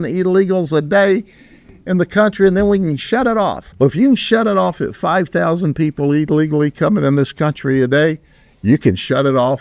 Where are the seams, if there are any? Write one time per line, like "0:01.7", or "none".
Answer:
0:03.6

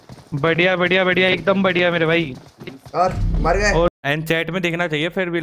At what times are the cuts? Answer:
0:03.9

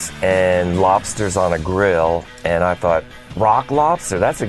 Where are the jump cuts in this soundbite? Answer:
0:03.2

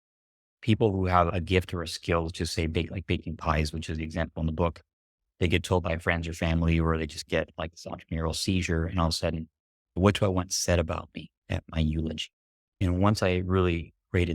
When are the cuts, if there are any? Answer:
0:01.3
0:09.8

